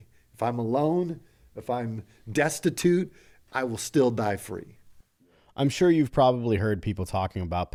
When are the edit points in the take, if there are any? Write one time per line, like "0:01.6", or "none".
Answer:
none